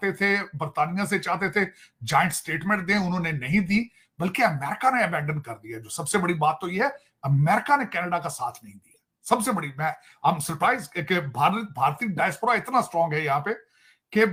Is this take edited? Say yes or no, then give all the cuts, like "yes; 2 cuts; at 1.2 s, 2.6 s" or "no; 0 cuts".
no; 0 cuts